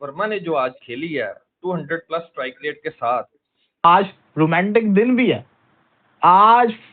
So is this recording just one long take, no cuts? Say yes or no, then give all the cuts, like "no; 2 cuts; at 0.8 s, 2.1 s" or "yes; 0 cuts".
no; 1 cut; at 3.8 s